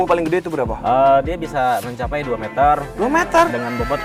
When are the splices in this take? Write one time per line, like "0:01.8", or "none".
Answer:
none